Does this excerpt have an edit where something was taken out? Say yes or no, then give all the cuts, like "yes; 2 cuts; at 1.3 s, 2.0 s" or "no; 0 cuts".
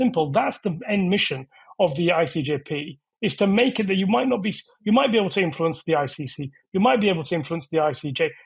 no; 0 cuts